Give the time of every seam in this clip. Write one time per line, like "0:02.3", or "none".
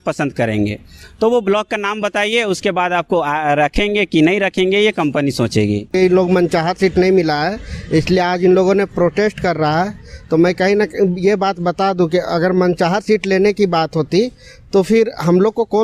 0:05.9